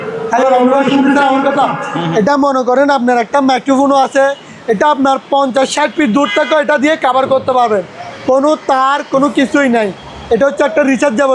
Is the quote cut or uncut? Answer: uncut